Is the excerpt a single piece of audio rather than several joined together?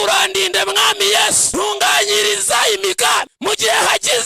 no; 2 cuts; at 1.4 s, 3.3 s

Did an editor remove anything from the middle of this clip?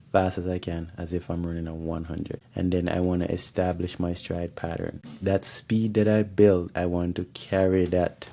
yes; 2 cuts; at 2.4 s, 5.1 s

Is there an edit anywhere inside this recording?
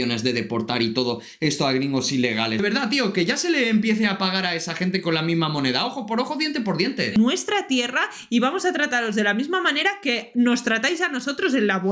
yes; 2 cuts; at 2.6 s, 7.2 s

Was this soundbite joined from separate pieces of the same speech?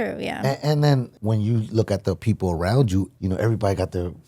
yes; 2 cuts; at 1.1 s, 3.1 s

